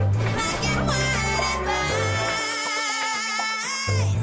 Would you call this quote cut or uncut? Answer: uncut